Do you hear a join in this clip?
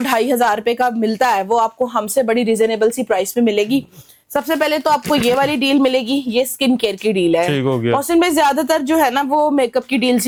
no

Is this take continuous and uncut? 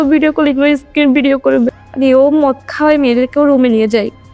no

